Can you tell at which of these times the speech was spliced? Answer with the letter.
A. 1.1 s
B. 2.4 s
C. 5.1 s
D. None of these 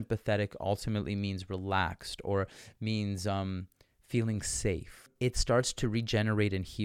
C